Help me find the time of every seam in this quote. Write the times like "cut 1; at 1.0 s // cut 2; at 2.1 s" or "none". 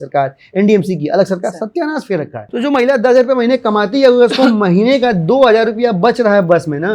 cut 1; at 2.4 s